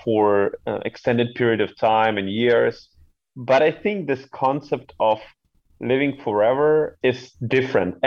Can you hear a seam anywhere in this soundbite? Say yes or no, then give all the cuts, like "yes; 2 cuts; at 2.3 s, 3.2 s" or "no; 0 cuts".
yes; 1 cut; at 6.9 s